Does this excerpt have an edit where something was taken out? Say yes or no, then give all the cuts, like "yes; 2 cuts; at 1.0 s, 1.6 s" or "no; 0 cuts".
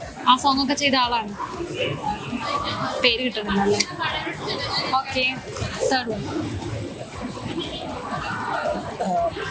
no; 0 cuts